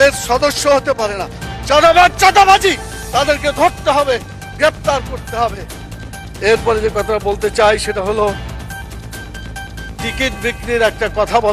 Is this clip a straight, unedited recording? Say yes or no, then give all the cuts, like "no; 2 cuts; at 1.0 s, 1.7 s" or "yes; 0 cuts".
yes; 0 cuts